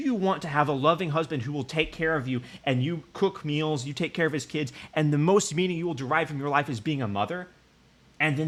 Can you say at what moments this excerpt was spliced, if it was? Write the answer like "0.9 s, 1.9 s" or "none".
none